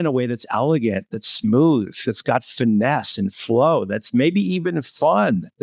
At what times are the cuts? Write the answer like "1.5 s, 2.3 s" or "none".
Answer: none